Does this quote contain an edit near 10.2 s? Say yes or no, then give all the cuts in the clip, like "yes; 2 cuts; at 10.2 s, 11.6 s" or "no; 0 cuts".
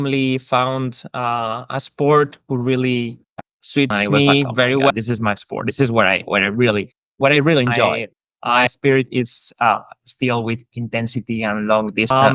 no; 2 cuts; at 4.9 s, 8.7 s